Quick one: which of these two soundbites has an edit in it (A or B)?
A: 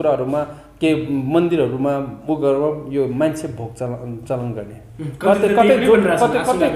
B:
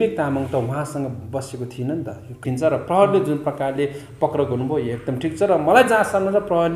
B